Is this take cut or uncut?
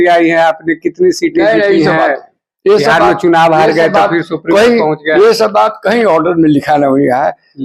uncut